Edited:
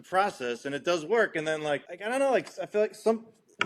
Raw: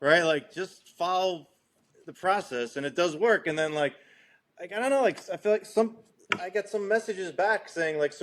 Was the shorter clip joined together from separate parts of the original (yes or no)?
yes